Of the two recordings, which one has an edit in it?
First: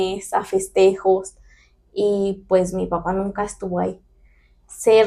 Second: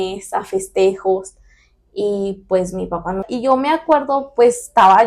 second; 1 cut; at 3.3 s

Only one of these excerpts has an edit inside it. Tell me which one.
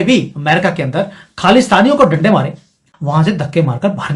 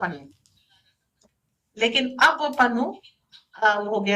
first; 1 cut; at 2.9 s

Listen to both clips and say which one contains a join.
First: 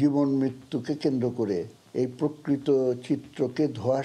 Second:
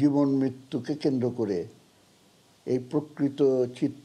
first; 1 cut; at 1.8 s

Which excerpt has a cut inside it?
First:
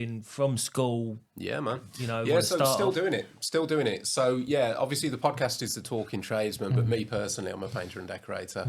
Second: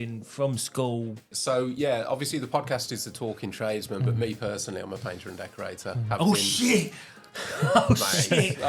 second; 1 cut; at 1.3 s

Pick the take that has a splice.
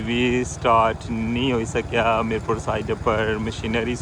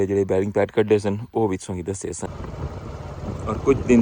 second; 1 cut; at 2.4 s

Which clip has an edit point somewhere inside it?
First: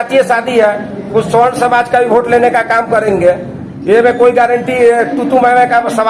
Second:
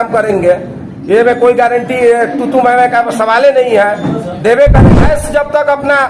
second; 1 cut; at 4.8 s

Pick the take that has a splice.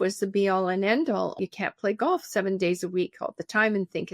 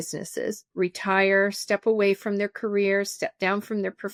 first; 1 cut; at 1.3 s

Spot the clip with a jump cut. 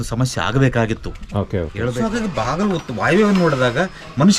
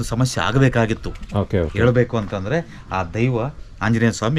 first; 1 cut; at 1.8 s

